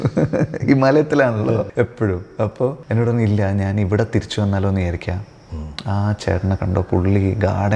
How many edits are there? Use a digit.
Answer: 2